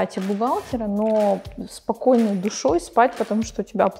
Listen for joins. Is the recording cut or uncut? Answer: uncut